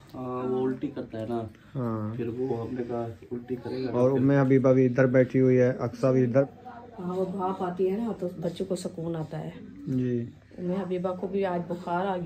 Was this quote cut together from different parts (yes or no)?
yes